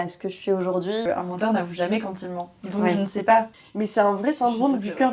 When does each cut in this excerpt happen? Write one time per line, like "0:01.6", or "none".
0:01.0
0:03.5